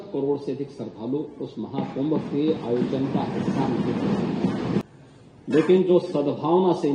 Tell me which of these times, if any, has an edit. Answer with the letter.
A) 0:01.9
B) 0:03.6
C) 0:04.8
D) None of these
C